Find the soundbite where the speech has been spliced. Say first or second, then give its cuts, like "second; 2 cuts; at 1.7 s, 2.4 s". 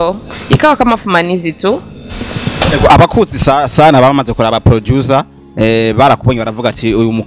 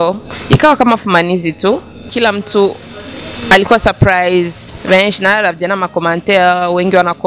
second; 1 cut; at 2.1 s